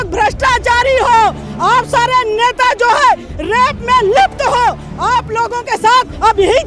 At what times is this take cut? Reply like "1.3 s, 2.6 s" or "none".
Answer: none